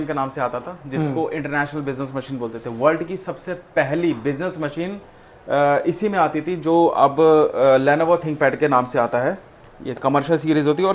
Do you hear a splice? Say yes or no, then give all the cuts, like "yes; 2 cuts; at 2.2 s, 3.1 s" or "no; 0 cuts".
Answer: no; 0 cuts